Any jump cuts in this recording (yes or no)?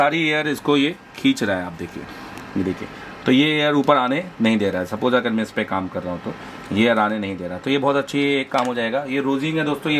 no